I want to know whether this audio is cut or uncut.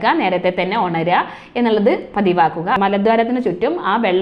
cut